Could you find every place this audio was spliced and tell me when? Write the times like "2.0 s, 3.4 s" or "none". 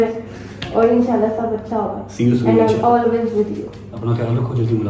none